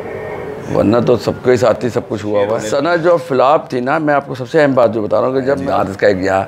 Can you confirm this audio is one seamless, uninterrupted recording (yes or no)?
no